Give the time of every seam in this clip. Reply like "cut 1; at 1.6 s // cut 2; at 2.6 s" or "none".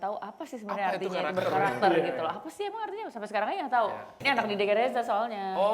cut 1; at 4.2 s